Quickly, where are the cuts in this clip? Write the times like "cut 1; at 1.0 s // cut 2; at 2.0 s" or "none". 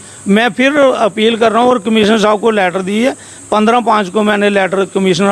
none